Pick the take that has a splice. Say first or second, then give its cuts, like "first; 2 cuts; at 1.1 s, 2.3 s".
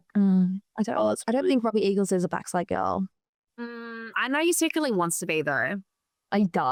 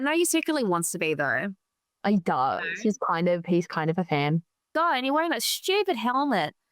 second; 1 cut; at 4.6 s